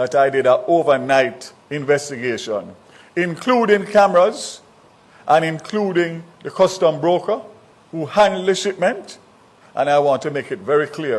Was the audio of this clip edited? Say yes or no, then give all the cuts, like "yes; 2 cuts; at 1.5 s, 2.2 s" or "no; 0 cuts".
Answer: no; 0 cuts